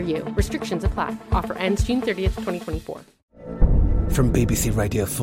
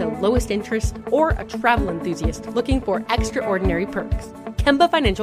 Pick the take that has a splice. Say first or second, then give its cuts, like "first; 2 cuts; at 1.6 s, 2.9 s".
first; 1 cut; at 3.2 s